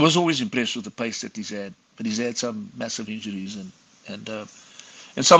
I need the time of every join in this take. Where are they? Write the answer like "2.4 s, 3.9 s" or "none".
none